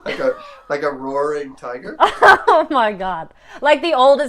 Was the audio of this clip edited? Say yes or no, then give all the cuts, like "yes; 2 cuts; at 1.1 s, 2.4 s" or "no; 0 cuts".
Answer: yes; 1 cut; at 1.9 s